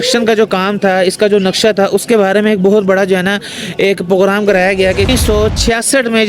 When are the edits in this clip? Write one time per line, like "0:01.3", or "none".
0:05.1